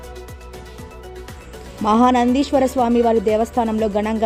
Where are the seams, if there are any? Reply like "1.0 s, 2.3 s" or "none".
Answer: none